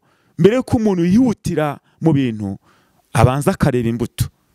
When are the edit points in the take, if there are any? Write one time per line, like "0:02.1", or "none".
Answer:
none